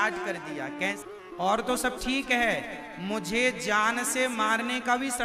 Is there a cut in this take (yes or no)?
yes